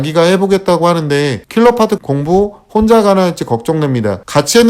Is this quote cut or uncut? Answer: uncut